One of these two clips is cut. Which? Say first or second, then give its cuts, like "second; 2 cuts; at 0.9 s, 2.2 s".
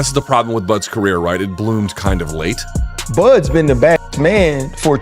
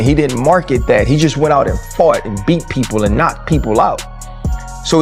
first; 1 cut; at 2.6 s